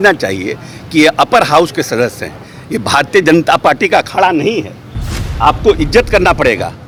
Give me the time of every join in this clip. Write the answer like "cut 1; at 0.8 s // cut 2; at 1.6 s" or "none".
none